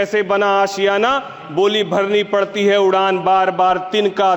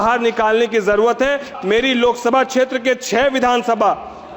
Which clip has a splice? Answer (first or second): second